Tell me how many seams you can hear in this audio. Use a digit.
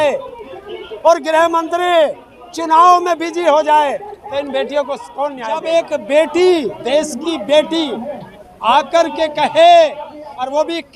1